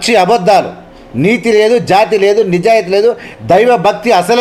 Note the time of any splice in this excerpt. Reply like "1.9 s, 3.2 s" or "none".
none